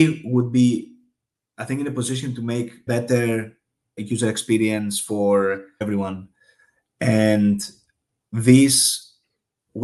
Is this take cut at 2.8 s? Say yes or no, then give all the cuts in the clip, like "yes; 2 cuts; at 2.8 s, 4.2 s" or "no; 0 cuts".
yes; 3 cuts; at 2.8 s, 4.0 s, 5.8 s